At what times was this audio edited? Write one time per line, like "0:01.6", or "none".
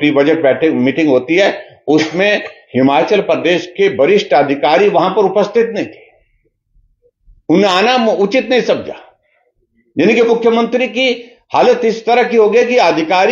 none